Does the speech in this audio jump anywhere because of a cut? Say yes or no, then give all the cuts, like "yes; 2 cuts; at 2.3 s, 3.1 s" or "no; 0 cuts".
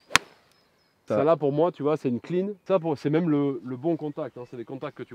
yes; 2 cuts; at 1.0 s, 2.6 s